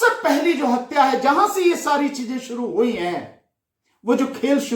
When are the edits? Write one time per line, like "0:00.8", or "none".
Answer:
none